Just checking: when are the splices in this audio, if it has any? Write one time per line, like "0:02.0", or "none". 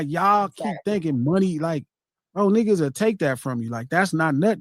none